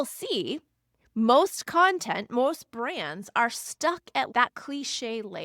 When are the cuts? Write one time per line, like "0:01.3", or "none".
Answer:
0:04.3